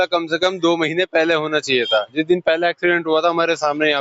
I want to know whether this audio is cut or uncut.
uncut